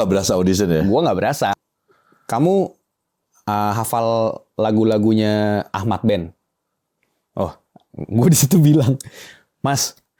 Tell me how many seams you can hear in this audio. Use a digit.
2